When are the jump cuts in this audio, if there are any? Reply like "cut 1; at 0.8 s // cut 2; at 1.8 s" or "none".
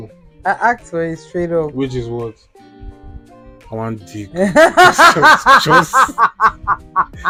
none